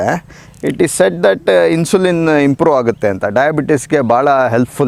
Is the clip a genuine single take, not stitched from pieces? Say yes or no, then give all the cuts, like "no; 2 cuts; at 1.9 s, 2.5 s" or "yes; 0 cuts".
yes; 0 cuts